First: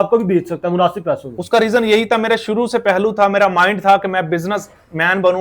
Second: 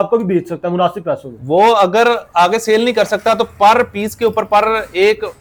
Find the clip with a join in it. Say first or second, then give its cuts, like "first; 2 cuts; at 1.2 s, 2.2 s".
first; 1 cut; at 1.3 s